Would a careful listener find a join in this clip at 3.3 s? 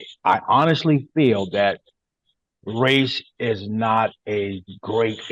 no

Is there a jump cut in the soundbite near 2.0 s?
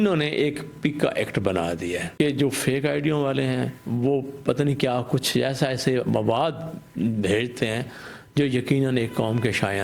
yes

